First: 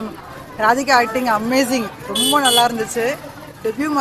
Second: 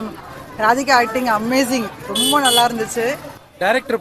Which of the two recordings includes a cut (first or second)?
second